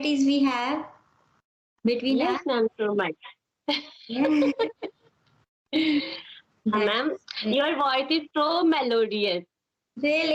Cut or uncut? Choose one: uncut